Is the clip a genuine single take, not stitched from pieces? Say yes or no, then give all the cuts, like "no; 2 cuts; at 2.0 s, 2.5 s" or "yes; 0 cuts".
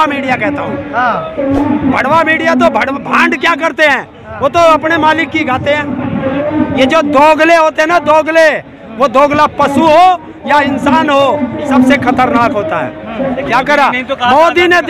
no; 2 cuts; at 6.4 s, 13.3 s